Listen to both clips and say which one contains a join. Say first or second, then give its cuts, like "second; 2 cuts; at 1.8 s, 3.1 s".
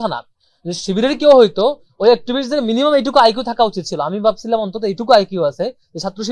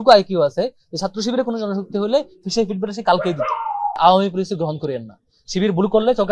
second; 1 cut; at 4.0 s